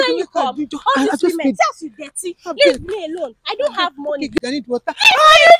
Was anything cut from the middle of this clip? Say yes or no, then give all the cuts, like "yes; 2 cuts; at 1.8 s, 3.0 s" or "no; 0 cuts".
yes; 1 cut; at 4.4 s